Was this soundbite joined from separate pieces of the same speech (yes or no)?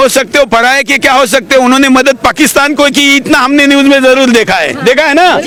no